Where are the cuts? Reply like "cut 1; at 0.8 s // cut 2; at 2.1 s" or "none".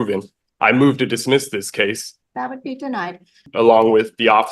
cut 1; at 2.1 s // cut 2; at 3.5 s